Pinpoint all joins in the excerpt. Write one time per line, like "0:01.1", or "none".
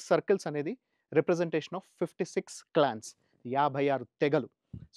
none